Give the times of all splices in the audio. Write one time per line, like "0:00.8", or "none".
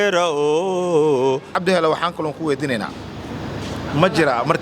0:01.6